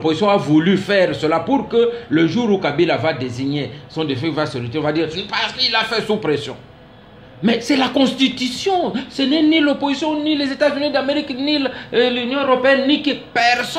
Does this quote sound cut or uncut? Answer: uncut